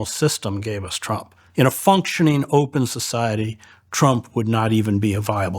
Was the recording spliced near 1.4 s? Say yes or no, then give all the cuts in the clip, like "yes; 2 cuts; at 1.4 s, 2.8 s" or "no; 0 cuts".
yes; 1 cut; at 1.4 s